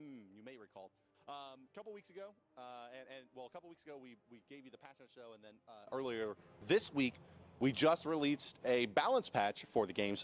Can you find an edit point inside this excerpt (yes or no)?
no